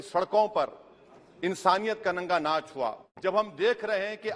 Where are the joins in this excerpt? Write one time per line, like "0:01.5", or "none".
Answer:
0:03.1